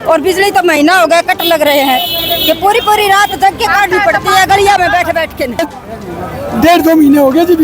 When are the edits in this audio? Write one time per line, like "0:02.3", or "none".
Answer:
0:05.6